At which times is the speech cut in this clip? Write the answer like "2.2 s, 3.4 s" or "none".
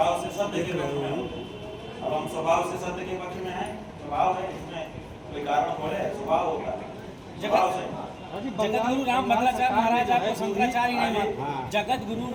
none